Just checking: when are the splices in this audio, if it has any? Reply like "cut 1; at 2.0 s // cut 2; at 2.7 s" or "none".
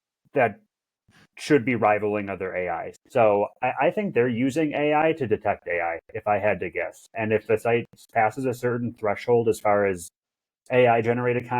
cut 1; at 2.9 s

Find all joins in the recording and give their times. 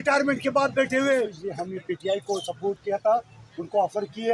cut 1; at 1.5 s

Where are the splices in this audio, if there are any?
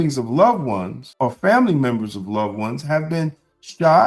cut 1; at 1.0 s

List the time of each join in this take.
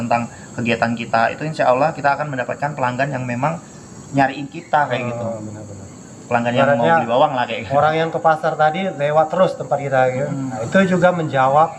cut 1; at 10.7 s

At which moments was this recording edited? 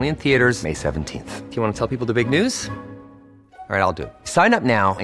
none

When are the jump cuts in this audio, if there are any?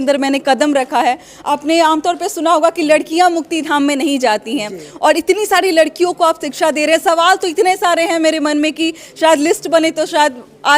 none

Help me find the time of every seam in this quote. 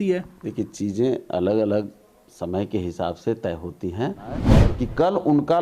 cut 1; at 4.5 s

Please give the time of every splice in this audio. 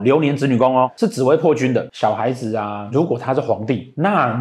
cut 1; at 0.9 s // cut 2; at 1.9 s

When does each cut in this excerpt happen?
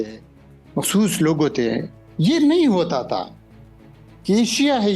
cut 1; at 2.0 s

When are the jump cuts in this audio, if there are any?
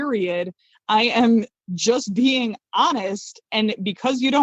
none

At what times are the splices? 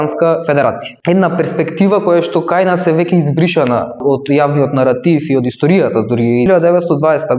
cut 1; at 0.9 s // cut 2; at 4.0 s // cut 3; at 6.5 s

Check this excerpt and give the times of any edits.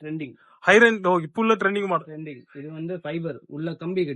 none

